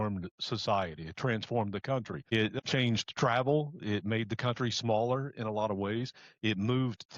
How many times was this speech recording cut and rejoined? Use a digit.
1